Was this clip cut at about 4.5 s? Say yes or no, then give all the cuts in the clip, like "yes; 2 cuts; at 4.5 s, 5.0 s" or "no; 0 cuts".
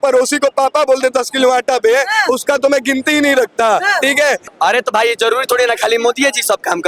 yes; 1 cut; at 4.5 s